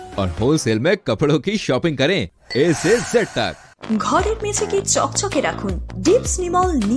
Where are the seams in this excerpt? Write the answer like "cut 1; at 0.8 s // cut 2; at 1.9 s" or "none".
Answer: cut 1; at 3.7 s